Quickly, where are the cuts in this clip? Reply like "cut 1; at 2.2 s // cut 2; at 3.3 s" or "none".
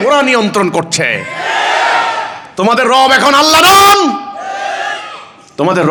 none